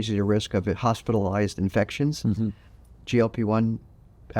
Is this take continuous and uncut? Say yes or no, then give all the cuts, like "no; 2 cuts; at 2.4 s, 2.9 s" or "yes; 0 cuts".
yes; 0 cuts